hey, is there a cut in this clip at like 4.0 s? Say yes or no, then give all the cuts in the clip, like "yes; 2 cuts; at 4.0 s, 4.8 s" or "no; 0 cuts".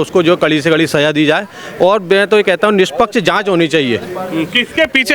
no; 0 cuts